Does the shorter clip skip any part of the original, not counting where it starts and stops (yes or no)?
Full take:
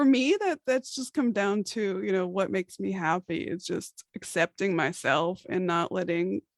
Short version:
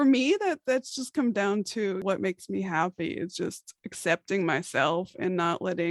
yes